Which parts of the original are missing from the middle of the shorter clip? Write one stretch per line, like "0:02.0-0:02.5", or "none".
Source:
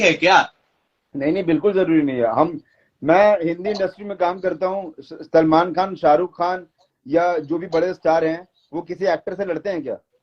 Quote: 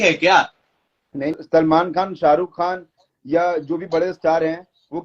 0:01.3-0:05.1